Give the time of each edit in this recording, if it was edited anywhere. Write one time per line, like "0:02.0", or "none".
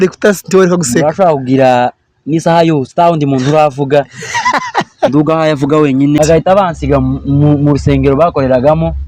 0:06.2